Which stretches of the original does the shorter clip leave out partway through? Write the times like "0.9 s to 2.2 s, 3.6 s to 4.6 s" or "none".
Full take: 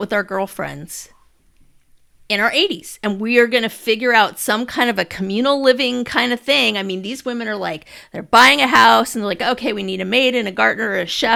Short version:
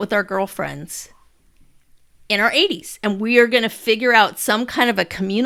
none